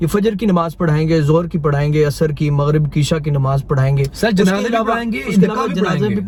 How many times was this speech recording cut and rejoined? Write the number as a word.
zero